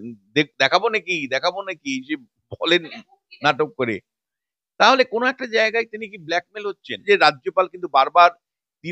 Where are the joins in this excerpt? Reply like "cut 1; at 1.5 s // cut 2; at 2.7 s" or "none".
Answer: cut 1; at 6.9 s